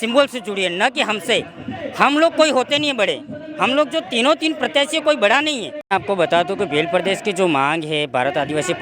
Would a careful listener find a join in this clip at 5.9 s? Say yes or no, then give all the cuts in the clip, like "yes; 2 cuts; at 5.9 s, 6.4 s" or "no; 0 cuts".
yes; 1 cut; at 5.9 s